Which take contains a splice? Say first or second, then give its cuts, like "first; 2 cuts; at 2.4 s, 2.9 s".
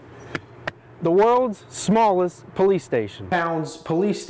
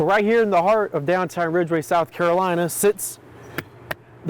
first; 1 cut; at 3.3 s